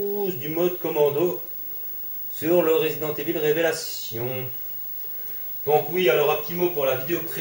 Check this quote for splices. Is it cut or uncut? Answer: uncut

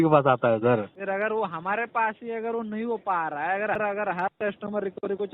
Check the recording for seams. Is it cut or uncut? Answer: cut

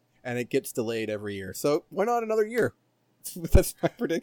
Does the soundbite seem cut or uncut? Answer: uncut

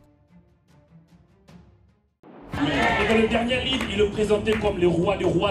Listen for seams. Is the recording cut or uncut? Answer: cut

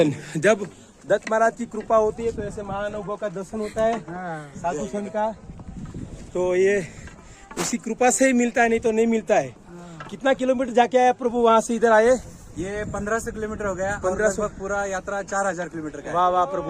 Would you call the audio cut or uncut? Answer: uncut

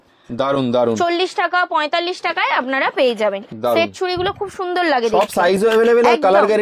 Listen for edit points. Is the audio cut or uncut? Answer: cut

